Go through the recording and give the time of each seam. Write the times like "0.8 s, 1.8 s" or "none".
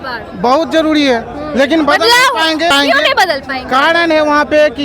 2.7 s